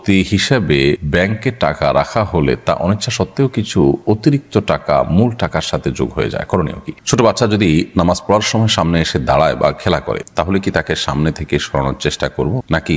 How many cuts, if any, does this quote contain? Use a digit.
2